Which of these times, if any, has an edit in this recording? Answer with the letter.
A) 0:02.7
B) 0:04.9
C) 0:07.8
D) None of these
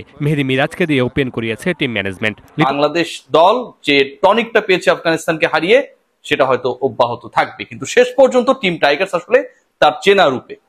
A